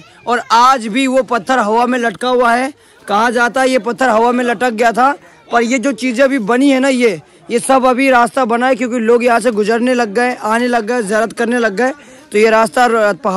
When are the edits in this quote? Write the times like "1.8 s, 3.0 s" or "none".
none